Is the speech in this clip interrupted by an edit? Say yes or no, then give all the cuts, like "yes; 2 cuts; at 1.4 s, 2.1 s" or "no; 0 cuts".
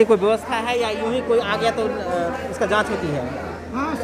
no; 0 cuts